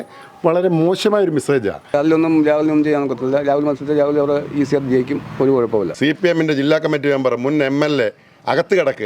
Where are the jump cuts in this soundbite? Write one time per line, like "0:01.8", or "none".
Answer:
0:01.9
0:05.9

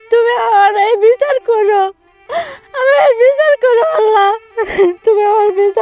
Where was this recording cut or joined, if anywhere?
none

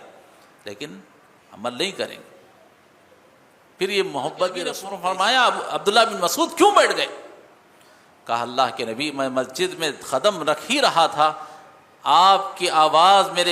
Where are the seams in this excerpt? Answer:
0:04.9

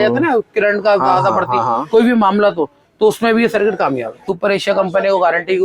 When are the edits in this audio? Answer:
0:04.3

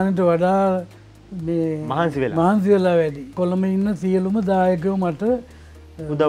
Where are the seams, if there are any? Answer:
0:03.2

